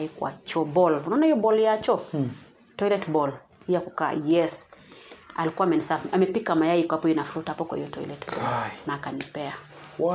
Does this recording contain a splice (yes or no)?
no